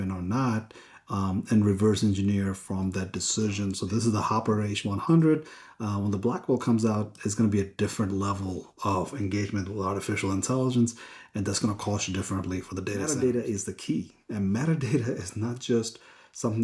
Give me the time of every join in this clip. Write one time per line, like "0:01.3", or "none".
0:03.8
0:13.0